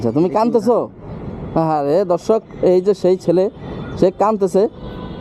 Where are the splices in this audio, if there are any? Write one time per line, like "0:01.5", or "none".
none